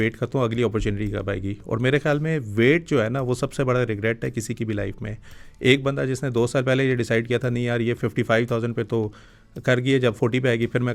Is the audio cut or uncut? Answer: uncut